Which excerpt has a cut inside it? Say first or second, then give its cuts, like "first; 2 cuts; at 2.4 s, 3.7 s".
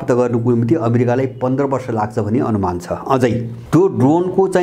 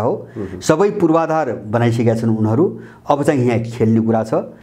first; 1 cut; at 3.5 s